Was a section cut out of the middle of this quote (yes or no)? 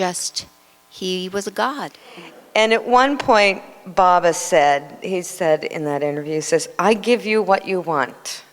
yes